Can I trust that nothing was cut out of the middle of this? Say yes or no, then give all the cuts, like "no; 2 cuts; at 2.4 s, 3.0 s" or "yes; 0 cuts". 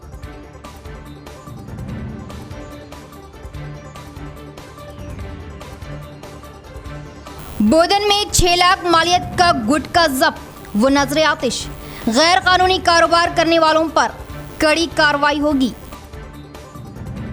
no; 1 cut; at 2.9 s